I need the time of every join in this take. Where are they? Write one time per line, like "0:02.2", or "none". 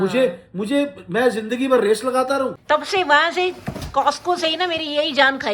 0:02.6